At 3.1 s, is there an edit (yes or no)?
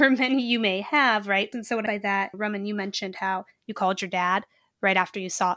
no